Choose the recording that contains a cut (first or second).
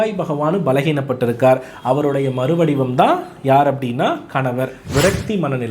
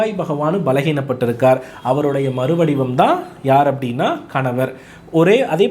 first